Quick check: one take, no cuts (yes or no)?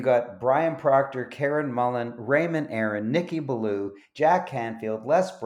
yes